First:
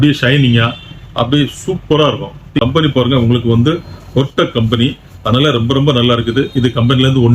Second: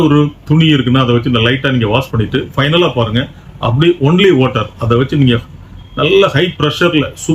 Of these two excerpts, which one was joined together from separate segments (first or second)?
first